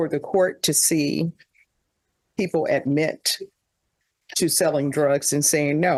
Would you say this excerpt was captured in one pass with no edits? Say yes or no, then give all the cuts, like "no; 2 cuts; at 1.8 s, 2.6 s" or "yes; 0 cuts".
yes; 0 cuts